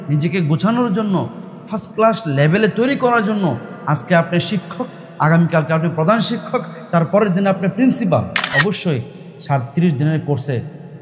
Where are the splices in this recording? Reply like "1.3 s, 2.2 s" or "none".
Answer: 8.4 s

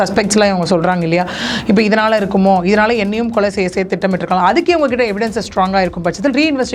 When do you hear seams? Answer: none

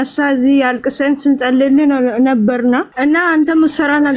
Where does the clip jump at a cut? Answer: 2.9 s

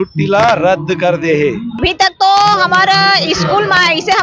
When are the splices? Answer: 1.8 s

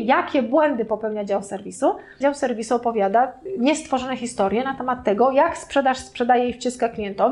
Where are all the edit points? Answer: 2.2 s, 3.4 s

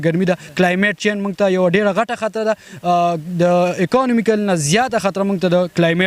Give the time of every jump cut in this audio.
none

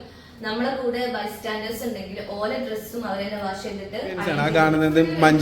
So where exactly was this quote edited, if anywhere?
4.4 s

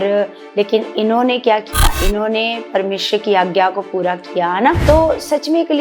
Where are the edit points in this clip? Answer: 4.8 s

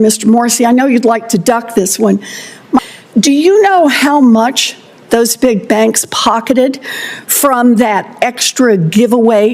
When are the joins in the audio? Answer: 2.9 s

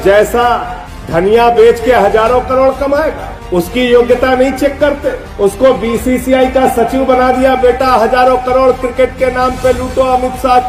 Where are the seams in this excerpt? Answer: none

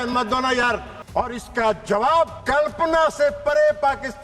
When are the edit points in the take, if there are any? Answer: 1.0 s, 2.4 s

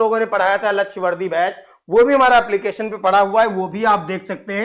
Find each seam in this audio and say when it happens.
none

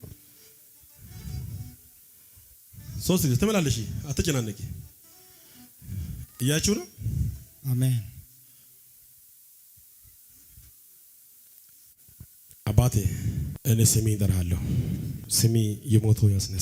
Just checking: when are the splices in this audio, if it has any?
13.5 s, 15.2 s

